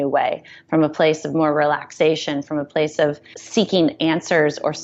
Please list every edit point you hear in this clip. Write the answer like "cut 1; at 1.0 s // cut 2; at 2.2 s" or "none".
none